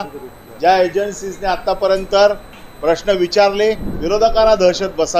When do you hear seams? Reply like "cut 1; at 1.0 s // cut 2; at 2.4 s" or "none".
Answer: cut 1; at 3.9 s

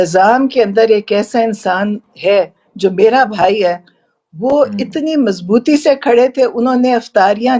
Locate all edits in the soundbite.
none

